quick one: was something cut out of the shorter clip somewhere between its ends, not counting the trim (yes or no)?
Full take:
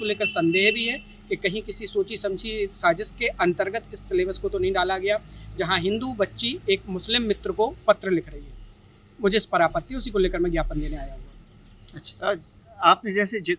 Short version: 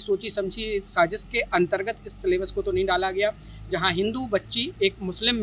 no